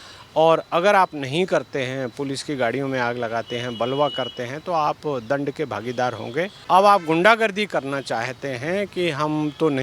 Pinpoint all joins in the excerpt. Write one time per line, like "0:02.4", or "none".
0:06.6